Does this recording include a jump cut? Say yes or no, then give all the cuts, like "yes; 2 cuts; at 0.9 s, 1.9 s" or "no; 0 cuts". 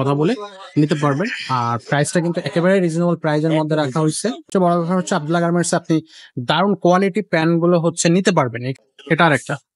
yes; 2 cuts; at 4.5 s, 8.6 s